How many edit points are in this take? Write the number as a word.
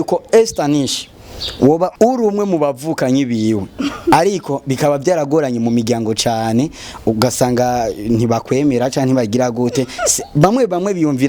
one